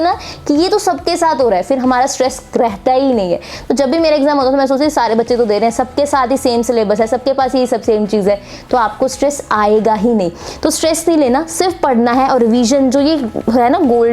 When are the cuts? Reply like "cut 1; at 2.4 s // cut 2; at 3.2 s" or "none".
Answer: none